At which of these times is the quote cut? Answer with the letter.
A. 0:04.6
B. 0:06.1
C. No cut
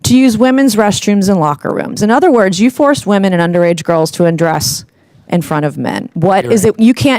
B